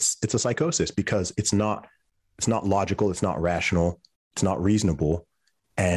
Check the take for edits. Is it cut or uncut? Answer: uncut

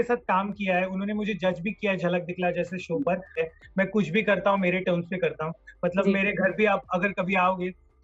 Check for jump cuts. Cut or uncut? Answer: cut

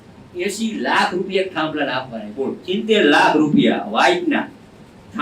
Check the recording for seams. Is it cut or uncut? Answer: cut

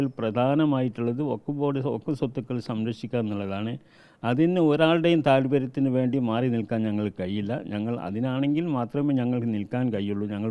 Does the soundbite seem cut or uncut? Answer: uncut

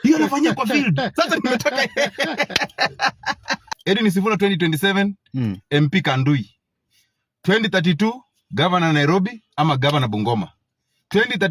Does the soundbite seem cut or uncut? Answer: cut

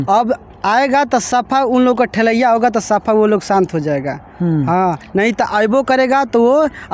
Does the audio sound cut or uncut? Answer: uncut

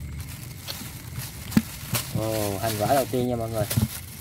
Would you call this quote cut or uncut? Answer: uncut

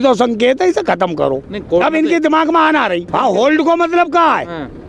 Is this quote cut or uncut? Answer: cut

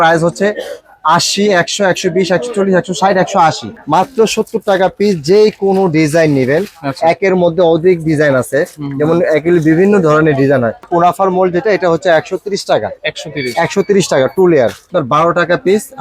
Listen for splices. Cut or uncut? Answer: cut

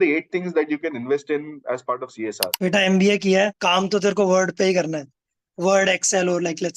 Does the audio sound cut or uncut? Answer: cut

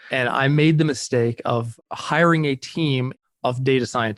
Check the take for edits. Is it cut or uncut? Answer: uncut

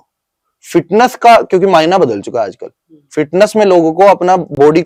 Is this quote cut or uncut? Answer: uncut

